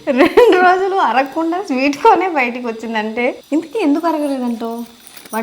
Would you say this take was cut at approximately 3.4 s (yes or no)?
yes